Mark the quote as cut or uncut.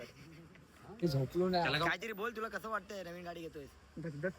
cut